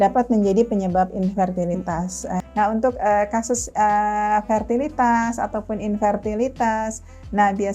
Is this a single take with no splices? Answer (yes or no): no